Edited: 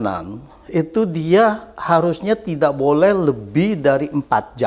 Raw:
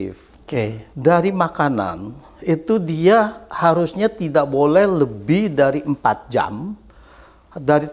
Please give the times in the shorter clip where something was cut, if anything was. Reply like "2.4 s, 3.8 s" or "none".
none